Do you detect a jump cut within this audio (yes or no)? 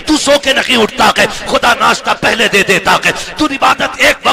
no